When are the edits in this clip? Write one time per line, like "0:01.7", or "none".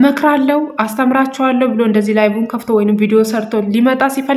none